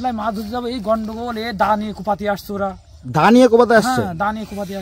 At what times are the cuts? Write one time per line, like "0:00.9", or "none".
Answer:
none